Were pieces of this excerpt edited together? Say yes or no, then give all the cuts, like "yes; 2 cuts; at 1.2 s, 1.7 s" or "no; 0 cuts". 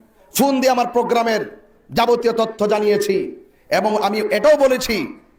no; 0 cuts